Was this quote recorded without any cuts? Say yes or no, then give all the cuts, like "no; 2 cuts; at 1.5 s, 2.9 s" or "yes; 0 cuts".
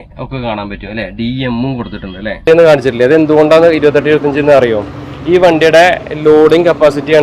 no; 1 cut; at 2.4 s